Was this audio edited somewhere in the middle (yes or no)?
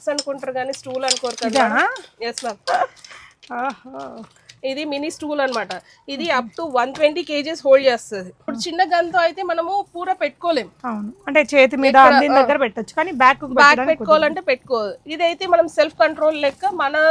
yes